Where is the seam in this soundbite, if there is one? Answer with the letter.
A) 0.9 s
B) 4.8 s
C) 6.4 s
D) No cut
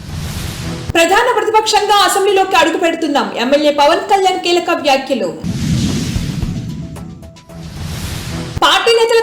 A